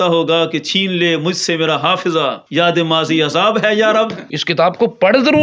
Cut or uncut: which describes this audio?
cut